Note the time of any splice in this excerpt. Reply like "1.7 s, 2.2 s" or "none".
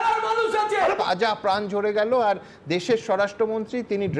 1.0 s